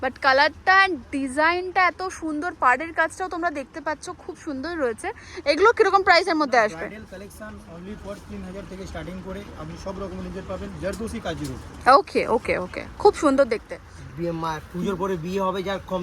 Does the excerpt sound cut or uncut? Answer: uncut